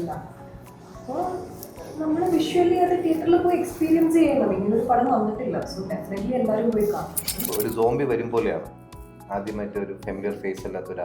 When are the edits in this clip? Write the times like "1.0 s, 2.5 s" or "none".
7.5 s